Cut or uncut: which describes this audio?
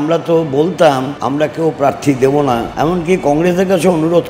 cut